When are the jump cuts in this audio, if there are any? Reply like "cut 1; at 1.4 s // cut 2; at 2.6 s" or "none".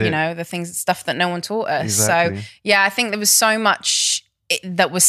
none